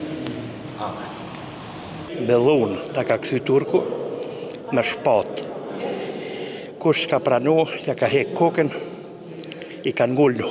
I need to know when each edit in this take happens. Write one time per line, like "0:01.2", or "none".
0:02.1